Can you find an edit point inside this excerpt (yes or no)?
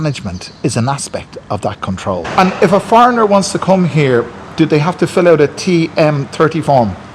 yes